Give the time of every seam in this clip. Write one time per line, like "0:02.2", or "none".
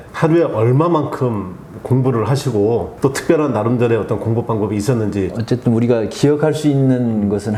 none